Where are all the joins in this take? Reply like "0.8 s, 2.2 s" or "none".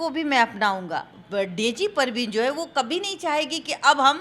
1.2 s